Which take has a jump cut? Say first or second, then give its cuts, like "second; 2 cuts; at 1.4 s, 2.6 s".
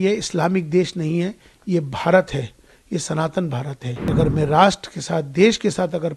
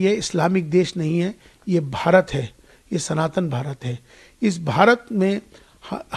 first; 1 cut; at 4.1 s